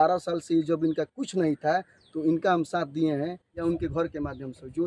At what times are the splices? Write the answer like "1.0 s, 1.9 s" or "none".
3.6 s